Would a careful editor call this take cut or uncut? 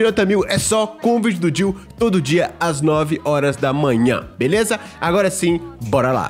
uncut